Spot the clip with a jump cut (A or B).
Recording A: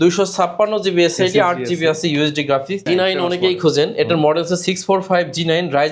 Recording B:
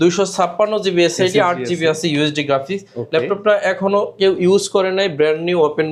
A